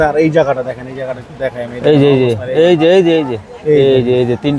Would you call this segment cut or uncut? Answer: uncut